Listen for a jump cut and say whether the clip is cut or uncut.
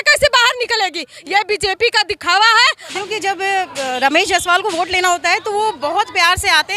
cut